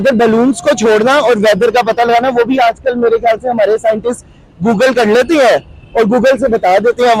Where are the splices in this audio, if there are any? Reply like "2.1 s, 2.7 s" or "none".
none